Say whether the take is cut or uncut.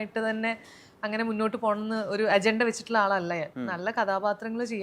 cut